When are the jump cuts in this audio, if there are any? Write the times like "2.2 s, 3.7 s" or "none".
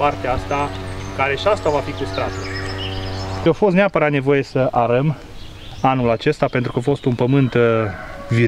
3.4 s